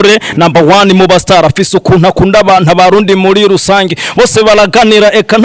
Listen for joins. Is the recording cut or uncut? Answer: uncut